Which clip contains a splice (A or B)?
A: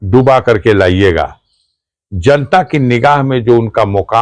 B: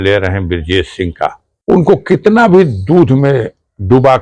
B